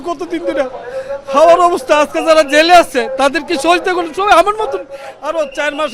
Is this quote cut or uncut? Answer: uncut